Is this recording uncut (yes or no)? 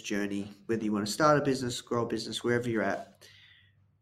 yes